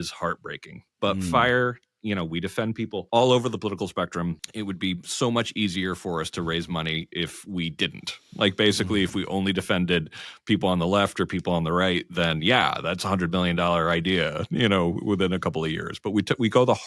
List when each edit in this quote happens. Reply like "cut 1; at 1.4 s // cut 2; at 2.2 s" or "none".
cut 1; at 3.0 s // cut 2; at 4.5 s